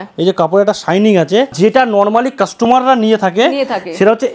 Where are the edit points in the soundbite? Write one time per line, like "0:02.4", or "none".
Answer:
0:01.5